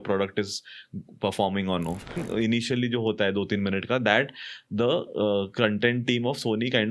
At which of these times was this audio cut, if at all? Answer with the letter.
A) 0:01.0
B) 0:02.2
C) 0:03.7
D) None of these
B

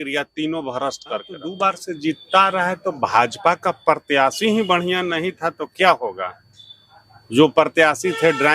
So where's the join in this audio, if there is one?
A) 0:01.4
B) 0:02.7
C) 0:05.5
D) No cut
A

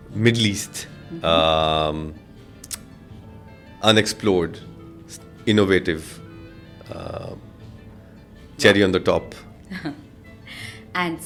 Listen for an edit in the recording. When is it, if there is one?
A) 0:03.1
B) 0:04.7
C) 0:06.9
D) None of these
D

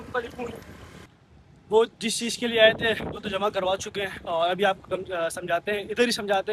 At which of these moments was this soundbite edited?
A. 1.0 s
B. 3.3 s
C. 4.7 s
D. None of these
A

